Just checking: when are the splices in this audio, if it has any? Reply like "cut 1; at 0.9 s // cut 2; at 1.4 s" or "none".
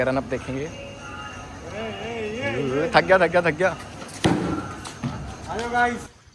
cut 1; at 5.3 s